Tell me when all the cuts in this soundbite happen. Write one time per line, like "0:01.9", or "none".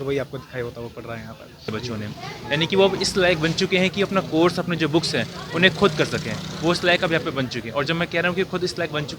0:01.7